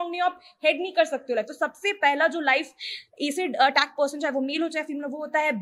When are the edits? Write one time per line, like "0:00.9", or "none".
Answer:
none

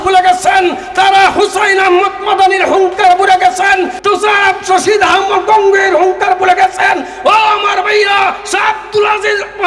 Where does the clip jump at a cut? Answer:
0:04.0

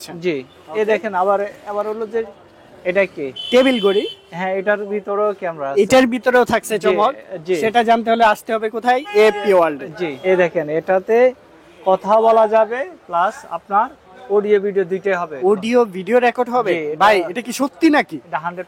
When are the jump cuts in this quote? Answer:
0:10.1

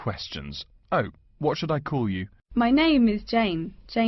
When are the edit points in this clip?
0:02.3

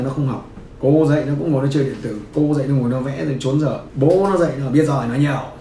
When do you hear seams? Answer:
0:03.9

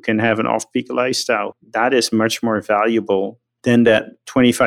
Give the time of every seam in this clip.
0:01.5
0:03.4

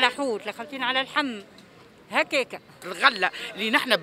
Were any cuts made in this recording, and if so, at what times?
0:02.9

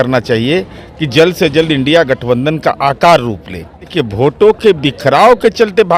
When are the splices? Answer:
0:03.9

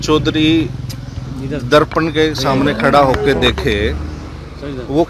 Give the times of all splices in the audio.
none

